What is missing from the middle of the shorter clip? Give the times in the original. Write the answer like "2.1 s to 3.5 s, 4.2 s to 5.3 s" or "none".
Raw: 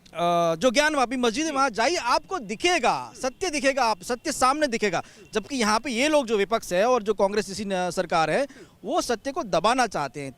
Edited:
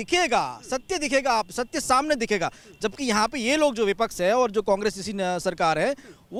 none